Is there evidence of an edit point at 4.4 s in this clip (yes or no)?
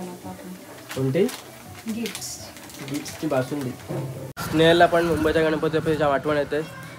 yes